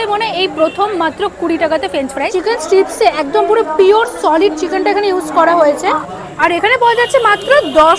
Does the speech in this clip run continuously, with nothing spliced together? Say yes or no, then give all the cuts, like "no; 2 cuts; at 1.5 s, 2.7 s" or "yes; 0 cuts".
no; 2 cuts; at 2.2 s, 6.0 s